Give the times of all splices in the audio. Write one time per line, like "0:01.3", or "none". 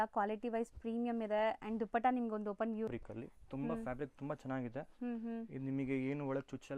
0:02.9